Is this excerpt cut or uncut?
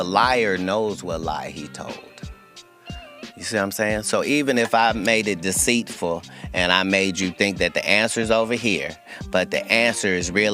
cut